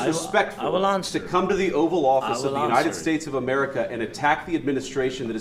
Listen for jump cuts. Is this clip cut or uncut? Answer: uncut